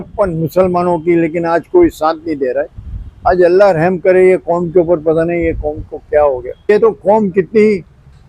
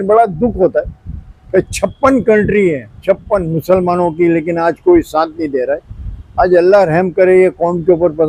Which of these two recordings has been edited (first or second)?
first